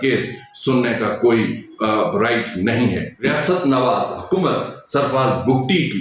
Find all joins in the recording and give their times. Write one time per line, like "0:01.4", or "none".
0:03.2